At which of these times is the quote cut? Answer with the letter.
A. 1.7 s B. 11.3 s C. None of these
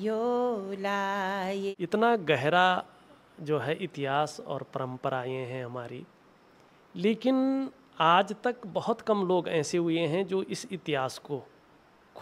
A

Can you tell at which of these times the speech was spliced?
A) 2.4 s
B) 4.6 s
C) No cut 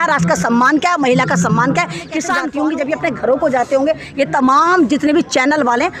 A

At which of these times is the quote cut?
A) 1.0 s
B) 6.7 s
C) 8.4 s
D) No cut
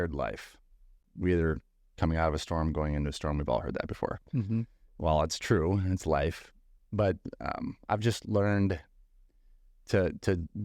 A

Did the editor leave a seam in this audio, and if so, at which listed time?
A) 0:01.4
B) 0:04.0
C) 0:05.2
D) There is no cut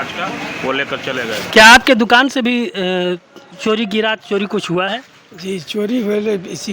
A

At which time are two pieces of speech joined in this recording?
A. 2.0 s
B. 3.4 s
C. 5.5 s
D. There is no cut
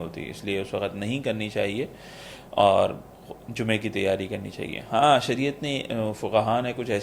D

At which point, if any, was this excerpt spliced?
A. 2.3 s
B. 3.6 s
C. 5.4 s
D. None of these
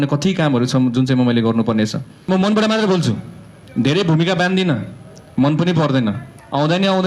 A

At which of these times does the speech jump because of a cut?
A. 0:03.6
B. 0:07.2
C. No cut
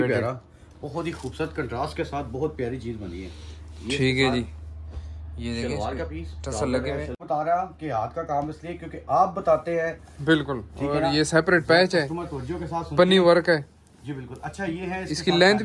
B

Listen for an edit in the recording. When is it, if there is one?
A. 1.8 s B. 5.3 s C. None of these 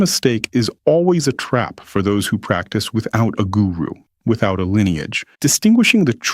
B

